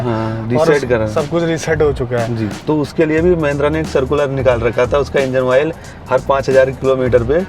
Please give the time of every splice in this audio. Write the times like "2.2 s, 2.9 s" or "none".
2.5 s